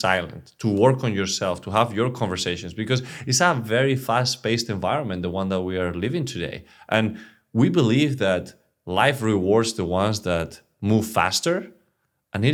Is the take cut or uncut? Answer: uncut